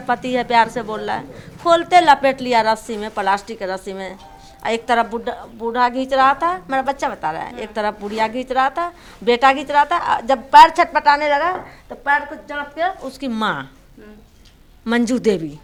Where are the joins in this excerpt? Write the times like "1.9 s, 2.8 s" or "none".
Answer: none